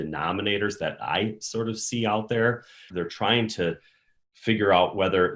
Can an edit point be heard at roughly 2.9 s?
yes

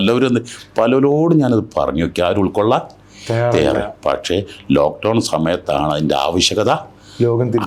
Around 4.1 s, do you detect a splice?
no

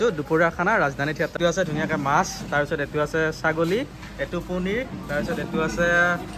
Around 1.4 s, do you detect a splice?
yes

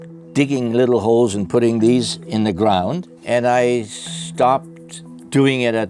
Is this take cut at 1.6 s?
no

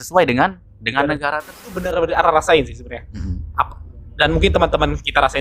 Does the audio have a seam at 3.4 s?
no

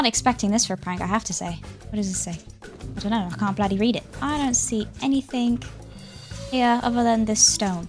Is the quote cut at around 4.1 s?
yes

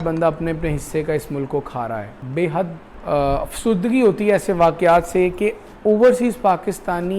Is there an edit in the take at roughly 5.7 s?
yes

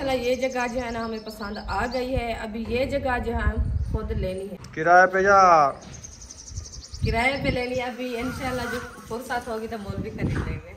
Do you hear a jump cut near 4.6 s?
yes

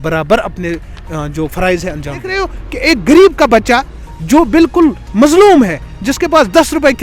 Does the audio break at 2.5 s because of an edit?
yes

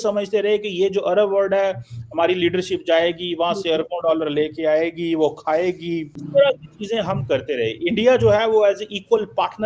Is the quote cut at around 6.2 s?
yes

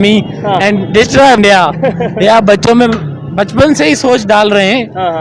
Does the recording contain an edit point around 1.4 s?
yes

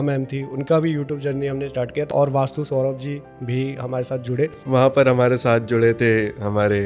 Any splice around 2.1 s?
yes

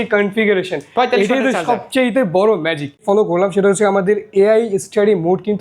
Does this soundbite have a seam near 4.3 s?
no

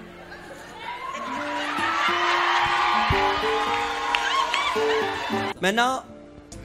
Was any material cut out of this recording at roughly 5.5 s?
yes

